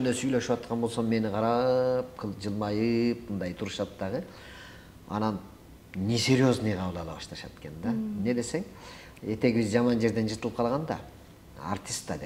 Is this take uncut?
yes; 0 cuts

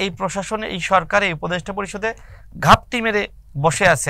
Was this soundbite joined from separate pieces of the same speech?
no; 0 cuts

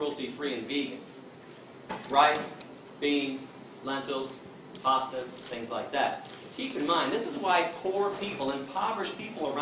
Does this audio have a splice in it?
yes; 1 cut; at 3.5 s

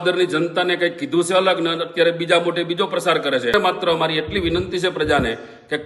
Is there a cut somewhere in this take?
yes; 1 cut; at 3.5 s

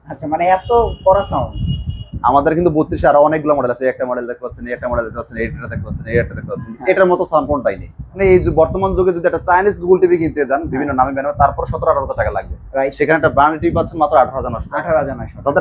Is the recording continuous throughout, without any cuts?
no; 1 cut; at 8.1 s

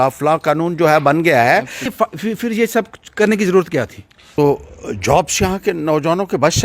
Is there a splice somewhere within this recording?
yes; 2 cuts; at 1.8 s, 4.3 s

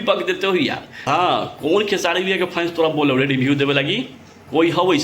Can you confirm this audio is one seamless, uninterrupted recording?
no; 1 cut; at 1.1 s

